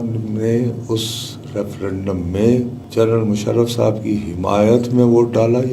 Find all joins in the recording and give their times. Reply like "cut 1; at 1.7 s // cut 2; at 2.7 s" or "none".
cut 1; at 2.8 s

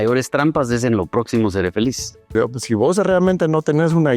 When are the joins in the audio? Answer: cut 1; at 2.3 s

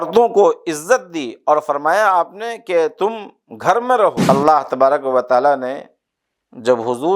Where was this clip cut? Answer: cut 1; at 4.2 s

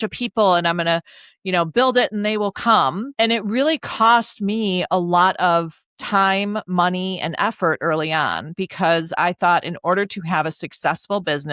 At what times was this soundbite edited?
cut 1; at 3.1 s

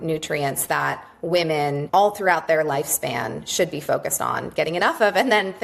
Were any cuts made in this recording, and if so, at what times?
cut 1; at 1.8 s

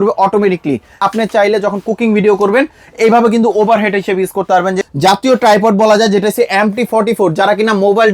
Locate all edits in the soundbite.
cut 1; at 1.0 s // cut 2; at 4.8 s

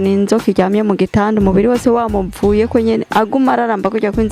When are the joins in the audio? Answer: none

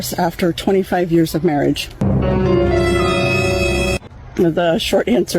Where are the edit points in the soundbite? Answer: none

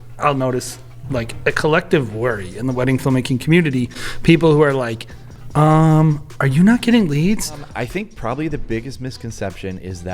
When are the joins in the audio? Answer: cut 1; at 7.6 s

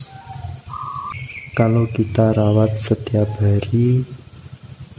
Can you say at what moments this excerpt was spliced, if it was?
cut 1; at 1.1 s

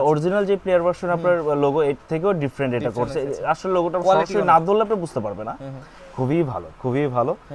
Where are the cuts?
none

